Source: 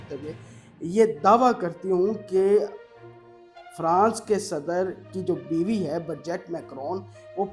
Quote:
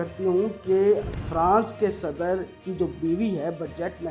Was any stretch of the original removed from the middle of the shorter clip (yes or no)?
yes